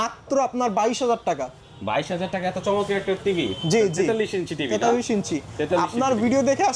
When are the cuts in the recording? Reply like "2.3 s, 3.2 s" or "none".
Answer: none